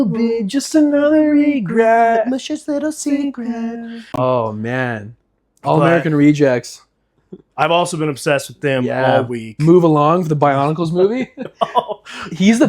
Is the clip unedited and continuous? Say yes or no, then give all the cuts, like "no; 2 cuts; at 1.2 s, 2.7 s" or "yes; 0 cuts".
no; 1 cut; at 4.2 s